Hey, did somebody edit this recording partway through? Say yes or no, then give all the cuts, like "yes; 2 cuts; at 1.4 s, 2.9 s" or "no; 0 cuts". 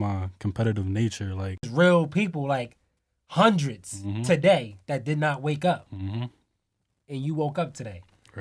yes; 1 cut; at 1.7 s